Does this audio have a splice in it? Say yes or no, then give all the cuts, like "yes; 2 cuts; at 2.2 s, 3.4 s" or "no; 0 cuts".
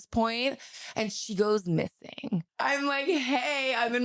yes; 1 cut; at 2.5 s